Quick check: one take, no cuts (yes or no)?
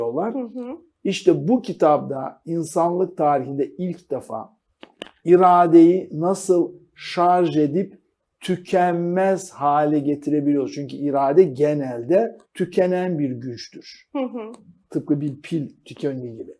no